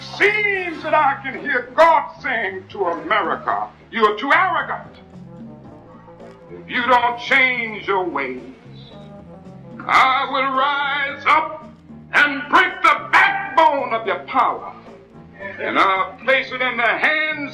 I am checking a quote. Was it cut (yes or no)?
no